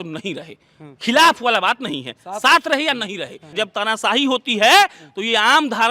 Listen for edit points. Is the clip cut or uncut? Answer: cut